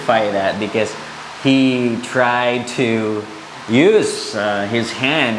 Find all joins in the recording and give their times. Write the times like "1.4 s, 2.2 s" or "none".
none